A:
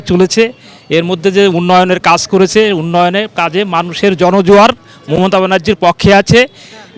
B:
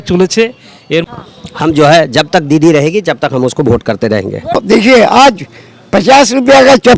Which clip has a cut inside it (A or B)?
B